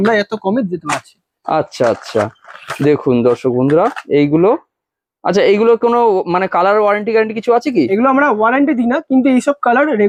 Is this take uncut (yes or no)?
yes